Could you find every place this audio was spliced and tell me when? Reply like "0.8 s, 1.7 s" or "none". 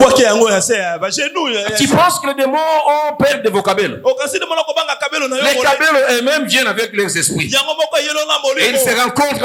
none